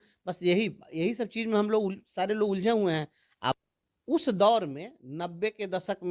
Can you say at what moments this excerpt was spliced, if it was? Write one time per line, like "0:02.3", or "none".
0:03.6

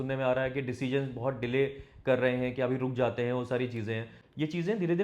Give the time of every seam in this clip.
0:04.1

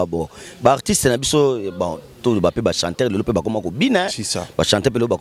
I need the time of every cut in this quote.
none

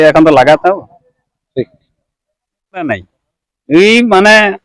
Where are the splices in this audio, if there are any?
0:02.9

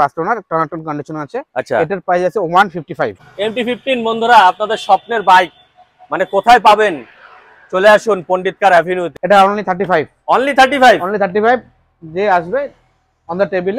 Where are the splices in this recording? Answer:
0:03.2
0:09.1

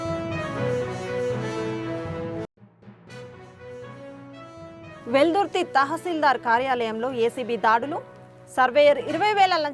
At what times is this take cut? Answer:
0:05.0

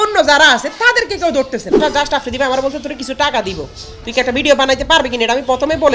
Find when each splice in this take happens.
0:01.8

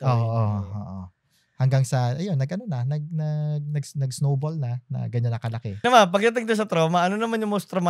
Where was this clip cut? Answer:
0:05.8

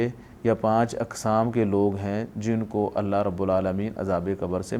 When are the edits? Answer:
none

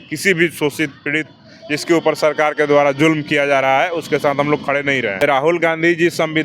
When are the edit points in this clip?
0:05.2

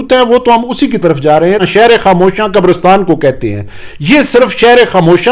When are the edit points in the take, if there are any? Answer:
0:01.6

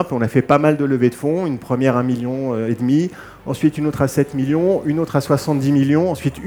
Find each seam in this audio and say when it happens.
none

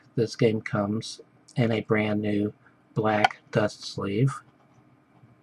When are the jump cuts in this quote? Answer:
0:01.9

